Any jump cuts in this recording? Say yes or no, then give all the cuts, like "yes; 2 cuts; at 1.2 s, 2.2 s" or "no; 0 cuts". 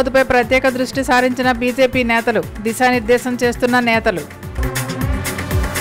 no; 0 cuts